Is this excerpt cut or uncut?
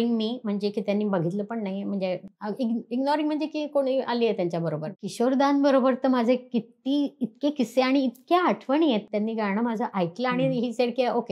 cut